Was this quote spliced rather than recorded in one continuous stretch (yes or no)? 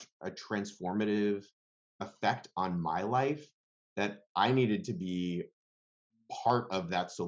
no